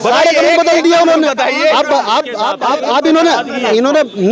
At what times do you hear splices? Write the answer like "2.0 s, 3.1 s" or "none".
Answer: 2.8 s